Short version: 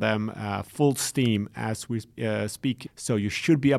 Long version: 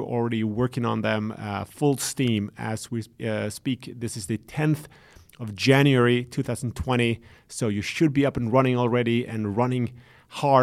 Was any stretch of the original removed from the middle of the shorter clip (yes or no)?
yes